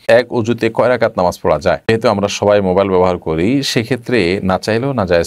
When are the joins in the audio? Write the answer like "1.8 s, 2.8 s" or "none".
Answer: 1.8 s